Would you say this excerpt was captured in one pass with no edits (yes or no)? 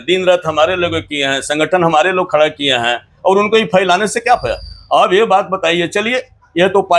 yes